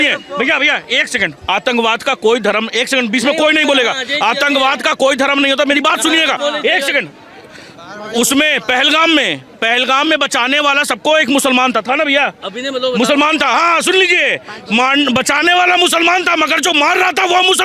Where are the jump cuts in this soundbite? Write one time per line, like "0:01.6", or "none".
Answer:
none